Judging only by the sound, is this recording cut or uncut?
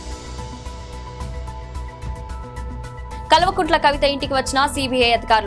uncut